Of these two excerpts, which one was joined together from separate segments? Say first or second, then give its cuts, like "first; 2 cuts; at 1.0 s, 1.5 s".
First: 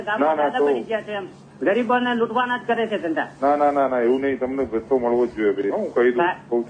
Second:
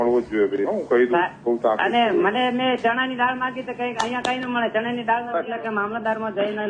second; 1 cut; at 5.4 s